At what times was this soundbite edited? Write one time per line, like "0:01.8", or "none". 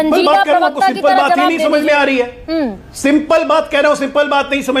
none